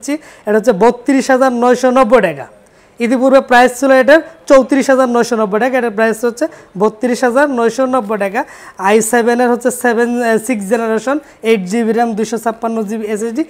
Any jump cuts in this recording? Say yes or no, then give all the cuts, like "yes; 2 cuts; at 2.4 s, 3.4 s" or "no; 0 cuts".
no; 0 cuts